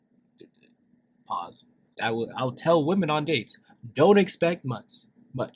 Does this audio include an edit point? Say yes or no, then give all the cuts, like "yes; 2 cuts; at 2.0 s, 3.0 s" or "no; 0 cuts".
yes; 1 cut; at 2.0 s